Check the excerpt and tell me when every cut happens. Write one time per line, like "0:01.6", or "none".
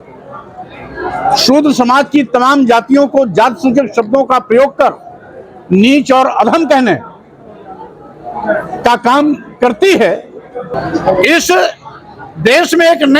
0:10.6

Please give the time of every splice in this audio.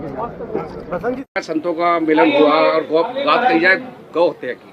0:01.2

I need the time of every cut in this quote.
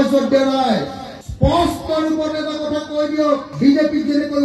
none

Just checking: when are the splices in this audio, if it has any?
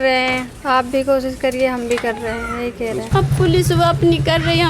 0:03.1

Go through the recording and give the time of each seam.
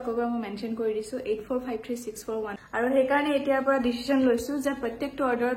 0:02.6

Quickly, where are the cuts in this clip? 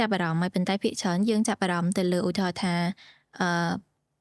none

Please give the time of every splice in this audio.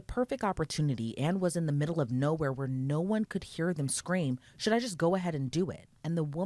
none

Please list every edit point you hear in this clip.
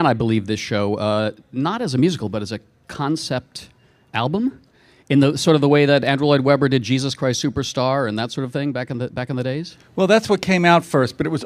0:01.7

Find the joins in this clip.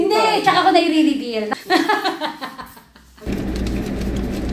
0:01.5
0:03.1

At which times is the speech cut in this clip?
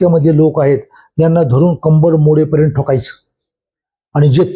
none

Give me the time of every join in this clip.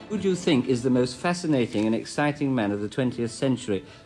none

